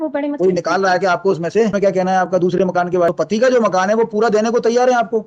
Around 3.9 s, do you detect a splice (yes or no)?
no